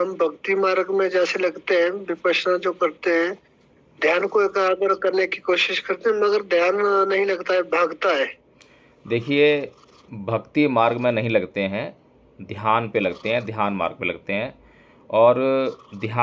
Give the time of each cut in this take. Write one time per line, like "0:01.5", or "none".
none